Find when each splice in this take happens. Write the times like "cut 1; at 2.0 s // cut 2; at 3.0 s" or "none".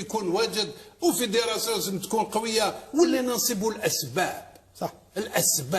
cut 1; at 3.1 s